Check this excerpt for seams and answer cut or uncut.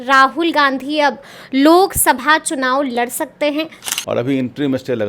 cut